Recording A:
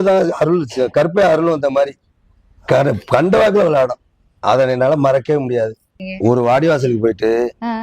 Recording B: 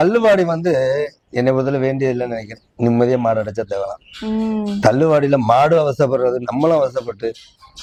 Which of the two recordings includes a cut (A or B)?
A